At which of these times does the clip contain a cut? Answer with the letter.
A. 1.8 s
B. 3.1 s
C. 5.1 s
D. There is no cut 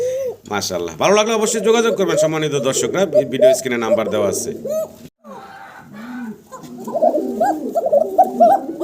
C